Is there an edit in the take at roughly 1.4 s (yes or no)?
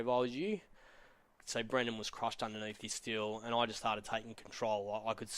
yes